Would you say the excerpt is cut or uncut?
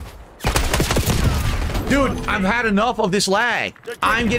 uncut